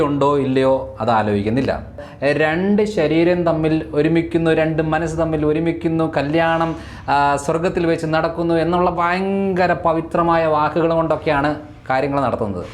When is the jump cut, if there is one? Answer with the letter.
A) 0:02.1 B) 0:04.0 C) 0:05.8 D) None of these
A